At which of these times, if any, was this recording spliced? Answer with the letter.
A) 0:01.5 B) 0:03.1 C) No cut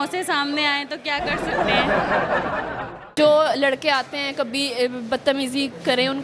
B